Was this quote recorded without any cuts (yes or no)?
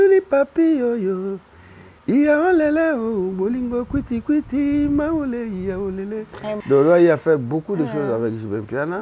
no